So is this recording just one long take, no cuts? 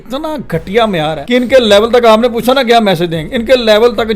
no; 1 cut; at 1.2 s

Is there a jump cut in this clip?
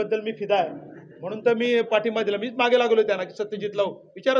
no; 0 cuts

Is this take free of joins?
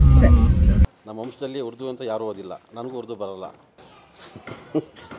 no; 2 cuts; at 1.0 s, 3.7 s

